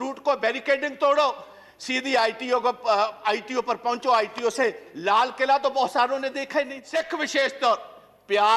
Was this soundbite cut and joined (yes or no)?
yes